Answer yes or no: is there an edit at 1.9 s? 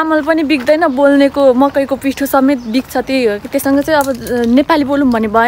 no